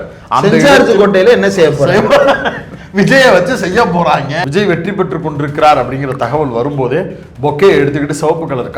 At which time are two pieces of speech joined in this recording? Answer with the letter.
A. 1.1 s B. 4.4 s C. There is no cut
B